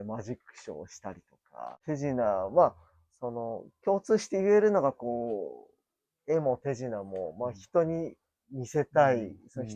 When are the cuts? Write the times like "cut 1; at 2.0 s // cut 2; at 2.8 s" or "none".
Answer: none